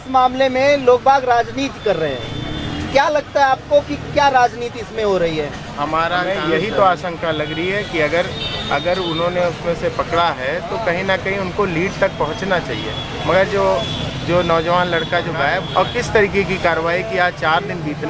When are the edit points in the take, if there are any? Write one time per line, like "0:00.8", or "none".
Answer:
0:06.3
0:15.6